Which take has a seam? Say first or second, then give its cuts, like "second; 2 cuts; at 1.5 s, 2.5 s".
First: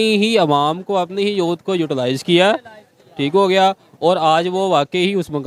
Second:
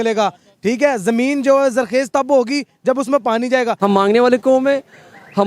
second; 1 cut; at 3.8 s